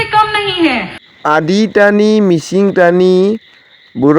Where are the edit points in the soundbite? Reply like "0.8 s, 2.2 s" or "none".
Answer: 0.9 s